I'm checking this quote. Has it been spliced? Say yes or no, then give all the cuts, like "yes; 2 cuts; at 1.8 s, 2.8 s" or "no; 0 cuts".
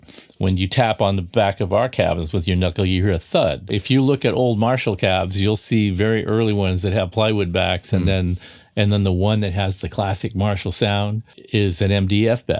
yes; 1 cut; at 3.8 s